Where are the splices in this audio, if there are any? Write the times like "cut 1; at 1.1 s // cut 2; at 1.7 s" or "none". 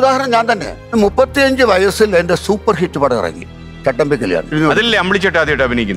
cut 1; at 0.9 s // cut 2; at 3.5 s // cut 3; at 4.5 s